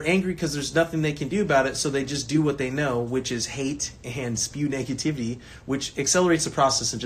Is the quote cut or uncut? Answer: uncut